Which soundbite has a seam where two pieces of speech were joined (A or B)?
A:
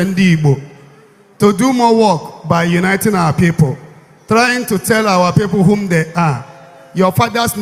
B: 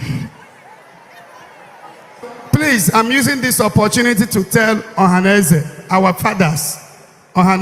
B